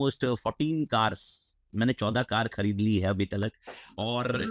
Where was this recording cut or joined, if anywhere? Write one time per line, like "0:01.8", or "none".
none